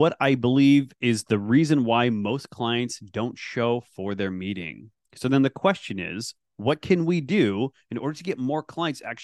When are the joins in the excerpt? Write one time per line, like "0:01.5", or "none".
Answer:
0:00.9

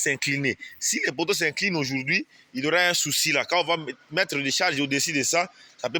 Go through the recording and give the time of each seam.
none

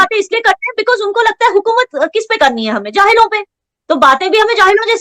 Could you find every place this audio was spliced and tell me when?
none

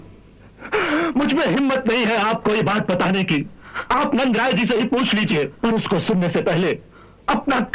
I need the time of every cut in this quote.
0:05.5

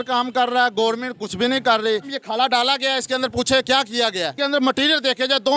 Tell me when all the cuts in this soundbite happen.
0:02.1
0:04.4

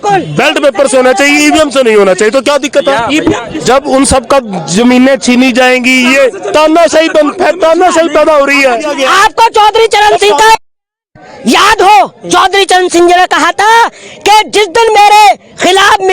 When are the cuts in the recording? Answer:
0:03.5
0:08.9

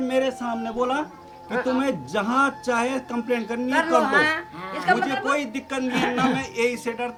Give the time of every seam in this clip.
none

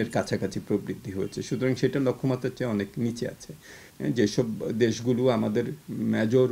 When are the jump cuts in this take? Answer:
none

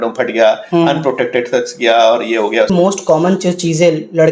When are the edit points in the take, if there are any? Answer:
0:02.7

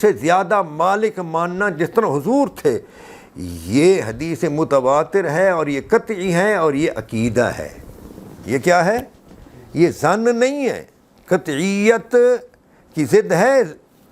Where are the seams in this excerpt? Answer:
none

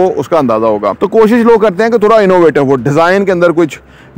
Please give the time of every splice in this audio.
0:01.0

